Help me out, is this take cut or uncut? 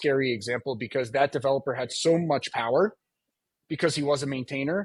uncut